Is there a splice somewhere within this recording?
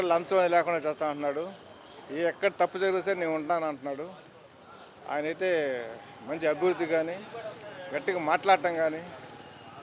no; 0 cuts

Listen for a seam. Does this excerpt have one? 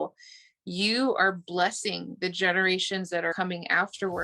yes; 1 cut; at 3.3 s

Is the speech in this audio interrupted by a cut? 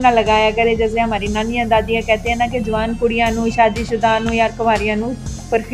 no; 0 cuts

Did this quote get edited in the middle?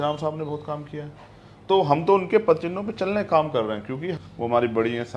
yes; 1 cut; at 4.2 s

